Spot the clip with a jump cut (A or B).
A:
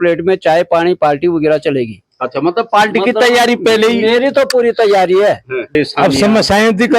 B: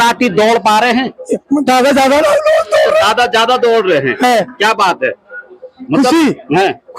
A